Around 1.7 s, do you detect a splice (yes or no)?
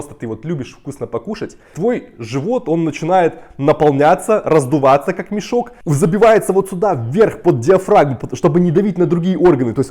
yes